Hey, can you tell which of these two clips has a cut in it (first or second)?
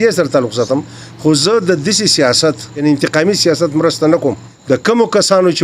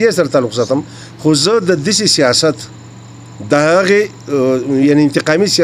first